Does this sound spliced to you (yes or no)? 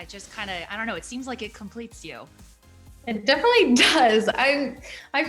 no